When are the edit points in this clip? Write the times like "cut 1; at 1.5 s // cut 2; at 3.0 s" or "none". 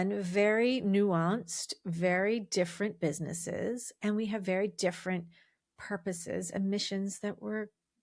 none